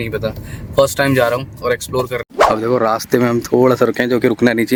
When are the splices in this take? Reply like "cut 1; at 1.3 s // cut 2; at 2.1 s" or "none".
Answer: none